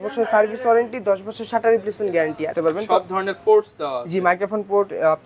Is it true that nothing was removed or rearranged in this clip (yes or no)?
no